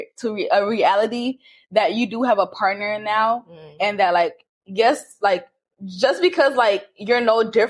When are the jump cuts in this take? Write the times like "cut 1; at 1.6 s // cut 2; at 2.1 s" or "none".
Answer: none